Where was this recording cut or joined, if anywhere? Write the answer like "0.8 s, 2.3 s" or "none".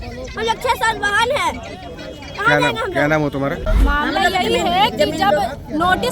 3.7 s